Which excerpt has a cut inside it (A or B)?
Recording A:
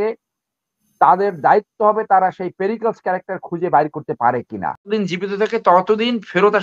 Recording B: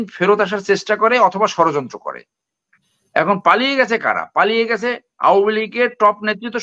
A